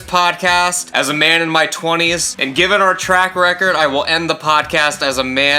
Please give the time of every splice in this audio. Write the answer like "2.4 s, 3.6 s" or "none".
0.8 s, 2.3 s